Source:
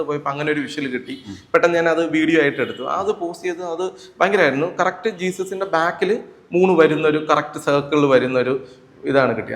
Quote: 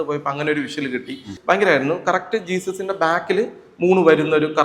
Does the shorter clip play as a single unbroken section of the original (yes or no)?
no